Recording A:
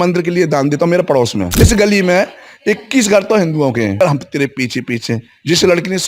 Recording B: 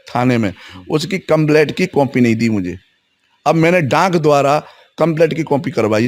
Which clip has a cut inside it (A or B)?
A